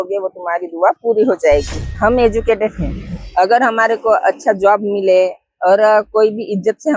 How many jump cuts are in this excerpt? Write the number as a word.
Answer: one